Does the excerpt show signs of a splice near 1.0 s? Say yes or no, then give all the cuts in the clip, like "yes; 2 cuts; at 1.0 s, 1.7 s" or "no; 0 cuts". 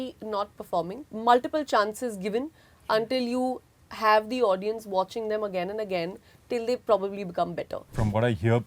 yes; 2 cuts; at 1.0 s, 7.9 s